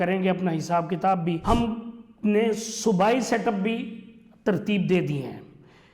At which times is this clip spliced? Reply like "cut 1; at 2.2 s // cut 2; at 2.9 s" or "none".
cut 1; at 1.4 s